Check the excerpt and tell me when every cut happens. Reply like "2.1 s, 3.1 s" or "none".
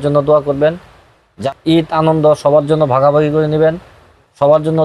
1.3 s